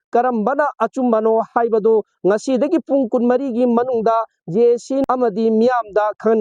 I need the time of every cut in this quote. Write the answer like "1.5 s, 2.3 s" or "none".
5.0 s